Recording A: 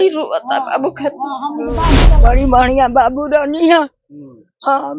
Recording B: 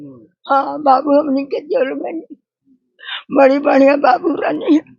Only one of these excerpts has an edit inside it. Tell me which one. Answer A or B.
A